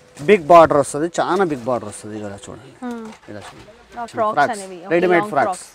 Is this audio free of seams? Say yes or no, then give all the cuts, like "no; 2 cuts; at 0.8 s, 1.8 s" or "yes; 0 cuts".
no; 1 cut; at 4.1 s